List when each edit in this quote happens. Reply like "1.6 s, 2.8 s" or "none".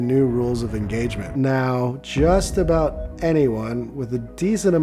1.2 s